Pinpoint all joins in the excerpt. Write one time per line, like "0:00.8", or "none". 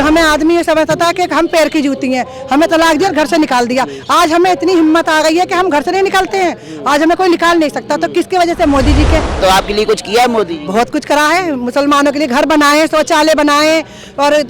0:09.4